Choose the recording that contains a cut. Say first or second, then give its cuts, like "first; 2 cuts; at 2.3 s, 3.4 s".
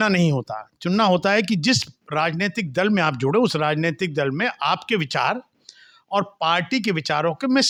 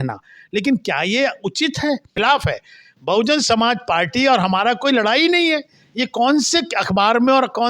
second; 1 cut; at 2.1 s